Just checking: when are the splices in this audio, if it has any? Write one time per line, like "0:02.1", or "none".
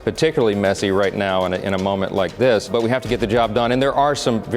0:02.7